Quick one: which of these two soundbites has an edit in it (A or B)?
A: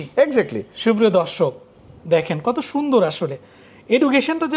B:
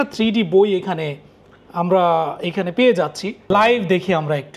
B